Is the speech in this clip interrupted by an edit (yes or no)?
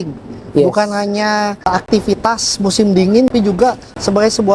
yes